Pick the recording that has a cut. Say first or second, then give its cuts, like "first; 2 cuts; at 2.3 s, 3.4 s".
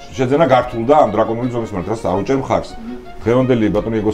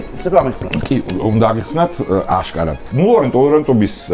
second; 1 cut; at 2.9 s